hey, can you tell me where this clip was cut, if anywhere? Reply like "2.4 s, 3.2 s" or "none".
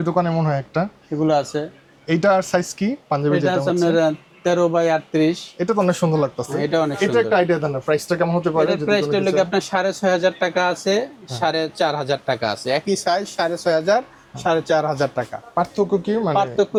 none